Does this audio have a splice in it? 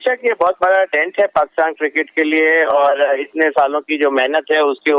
no; 0 cuts

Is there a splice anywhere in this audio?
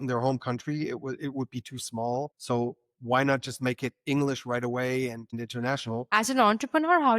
yes; 2 cuts; at 2.4 s, 6.1 s

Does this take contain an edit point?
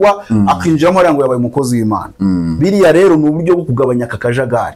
no; 0 cuts

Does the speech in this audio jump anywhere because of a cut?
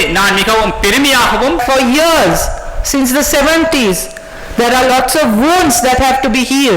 yes; 1 cut; at 1.6 s

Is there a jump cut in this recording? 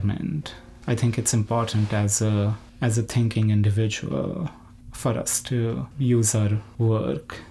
no; 0 cuts

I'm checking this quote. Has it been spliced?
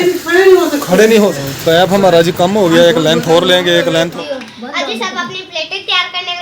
yes; 2 cuts; at 1.5 s, 4.1 s

